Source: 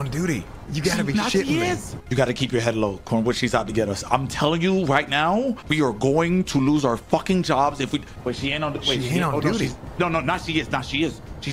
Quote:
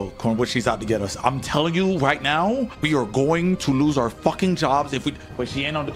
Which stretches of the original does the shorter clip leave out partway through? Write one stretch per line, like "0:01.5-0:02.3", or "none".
none

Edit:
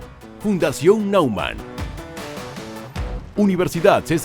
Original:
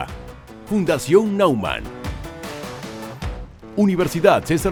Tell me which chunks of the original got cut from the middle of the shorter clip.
0:03.5-0:03.7

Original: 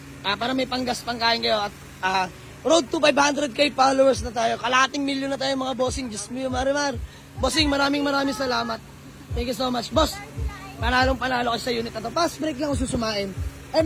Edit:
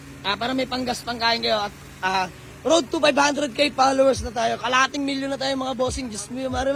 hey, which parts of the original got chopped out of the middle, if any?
none

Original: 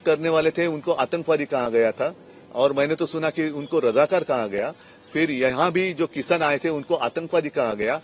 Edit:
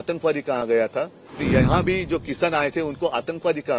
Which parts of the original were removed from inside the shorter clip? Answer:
0:02.5-0:05.3

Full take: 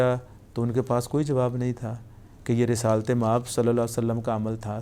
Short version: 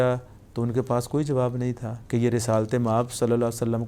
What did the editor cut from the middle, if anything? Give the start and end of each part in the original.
0:01.9-0:02.3

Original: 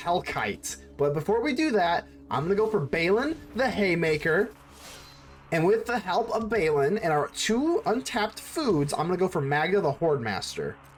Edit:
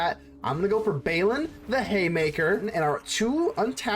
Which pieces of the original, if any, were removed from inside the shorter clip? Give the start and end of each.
0:04.5-0:07.0

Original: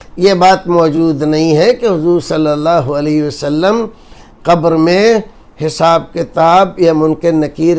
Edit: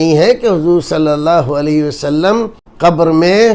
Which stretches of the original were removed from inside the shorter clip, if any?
0:04.0-0:04.3

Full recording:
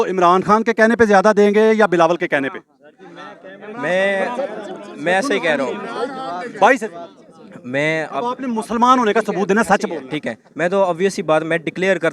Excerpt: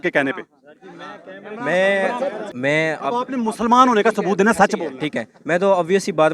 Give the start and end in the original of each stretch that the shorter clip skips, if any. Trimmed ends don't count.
0:04.6-0:07.6

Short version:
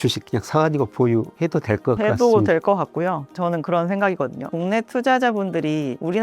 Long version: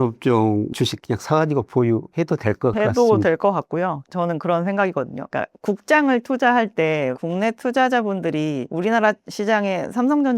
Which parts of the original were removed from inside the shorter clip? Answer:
0:05.3-0:07.2

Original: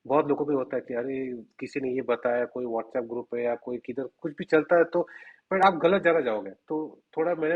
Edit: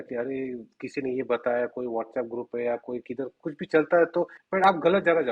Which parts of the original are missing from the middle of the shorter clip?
0:05.2-0:05.4

